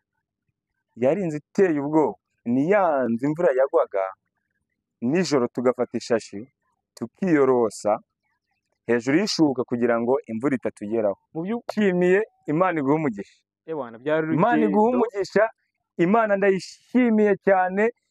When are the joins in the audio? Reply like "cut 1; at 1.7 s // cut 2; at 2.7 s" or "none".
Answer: cut 1; at 11.7 s

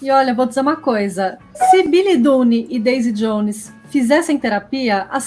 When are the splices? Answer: cut 1; at 1.4 s

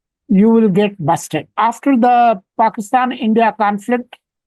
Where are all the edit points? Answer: cut 1; at 1.5 s

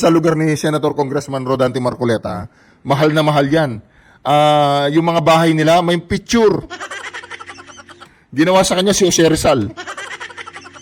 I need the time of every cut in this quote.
cut 1; at 9.8 s

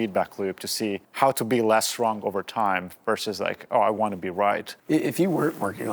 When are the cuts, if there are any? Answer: cut 1; at 1.0 s // cut 2; at 4.7 s

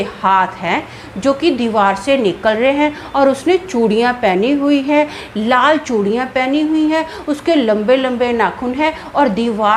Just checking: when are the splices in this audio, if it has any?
none

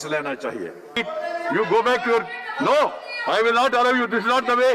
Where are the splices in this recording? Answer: cut 1; at 1.0 s

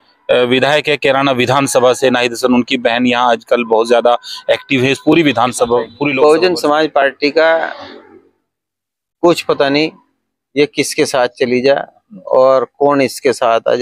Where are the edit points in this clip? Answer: cut 1; at 6.0 s

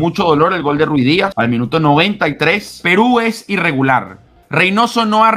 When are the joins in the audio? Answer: cut 1; at 1.3 s // cut 2; at 2.7 s

